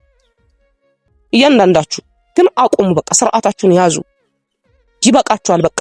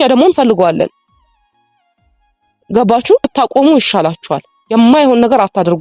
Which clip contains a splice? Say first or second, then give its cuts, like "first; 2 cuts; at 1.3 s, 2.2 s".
second; 1 cut; at 3.3 s